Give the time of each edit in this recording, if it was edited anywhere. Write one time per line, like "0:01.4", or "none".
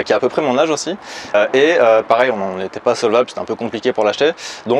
0:01.3